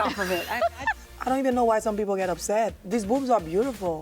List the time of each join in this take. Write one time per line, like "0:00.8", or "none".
0:01.0
0:02.8